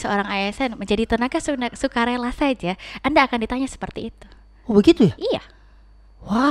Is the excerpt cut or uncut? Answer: uncut